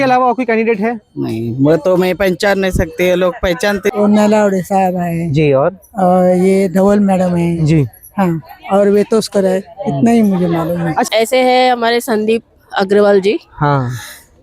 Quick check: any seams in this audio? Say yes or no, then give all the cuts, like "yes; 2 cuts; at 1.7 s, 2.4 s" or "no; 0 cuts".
yes; 2 cuts; at 3.9 s, 11.1 s